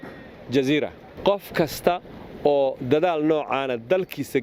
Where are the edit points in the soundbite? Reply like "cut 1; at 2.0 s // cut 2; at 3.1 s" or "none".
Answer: cut 1; at 1.1 s